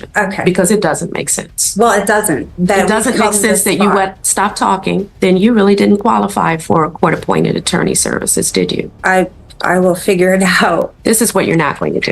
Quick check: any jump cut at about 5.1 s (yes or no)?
yes